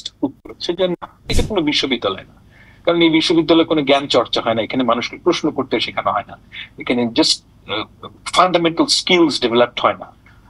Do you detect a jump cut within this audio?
yes; 1 cut; at 1.3 s

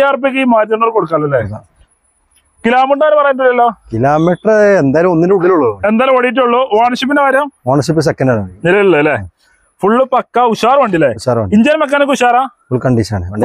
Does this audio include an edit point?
no; 0 cuts

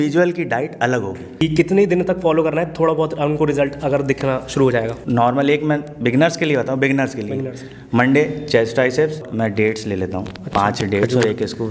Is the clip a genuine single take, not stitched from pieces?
no; 3 cuts; at 1.4 s, 5.0 s, 9.3 s

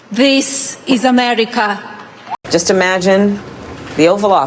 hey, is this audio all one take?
no; 1 cut; at 2.4 s

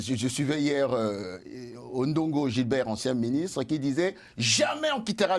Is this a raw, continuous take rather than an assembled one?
yes; 0 cuts

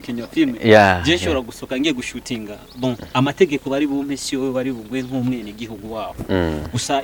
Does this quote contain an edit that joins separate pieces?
no; 0 cuts

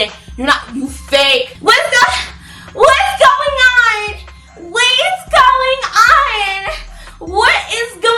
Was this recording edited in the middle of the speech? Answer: yes; 1 cut; at 1.5 s

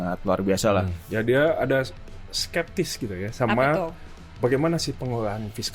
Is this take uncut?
no; 1 cut; at 1.0 s

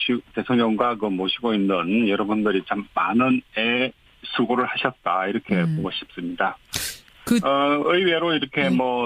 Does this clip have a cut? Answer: no; 0 cuts

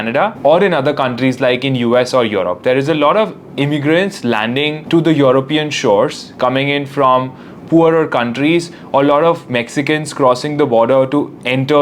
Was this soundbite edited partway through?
no; 0 cuts

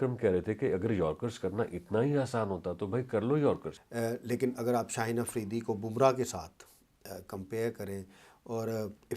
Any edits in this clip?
yes; 1 cut; at 3.8 s

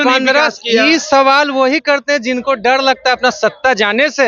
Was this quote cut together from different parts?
no; 0 cuts

